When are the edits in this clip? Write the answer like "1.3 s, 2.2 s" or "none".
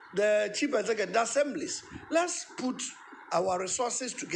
none

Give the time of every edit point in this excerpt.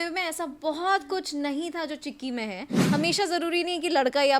2.8 s

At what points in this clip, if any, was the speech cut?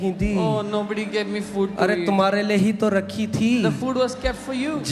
none

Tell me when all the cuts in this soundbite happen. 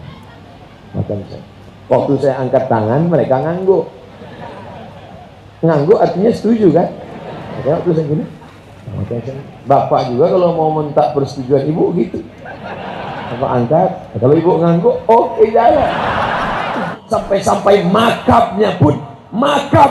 16.9 s

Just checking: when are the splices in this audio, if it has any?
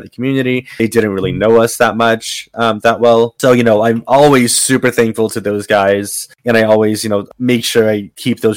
7.3 s

